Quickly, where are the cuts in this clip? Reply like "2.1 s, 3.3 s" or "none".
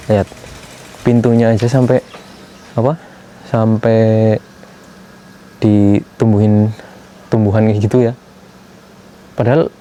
none